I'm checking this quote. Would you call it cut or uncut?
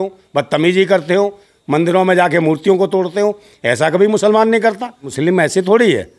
cut